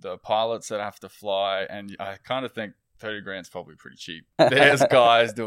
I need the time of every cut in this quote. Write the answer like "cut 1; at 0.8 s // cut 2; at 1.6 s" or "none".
cut 1; at 4.3 s